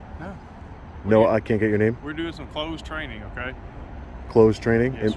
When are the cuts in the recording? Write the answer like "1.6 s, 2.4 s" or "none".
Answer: none